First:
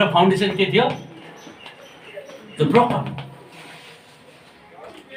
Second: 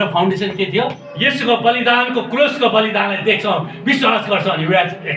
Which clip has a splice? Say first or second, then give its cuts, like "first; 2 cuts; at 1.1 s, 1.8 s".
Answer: second; 1 cut; at 1.1 s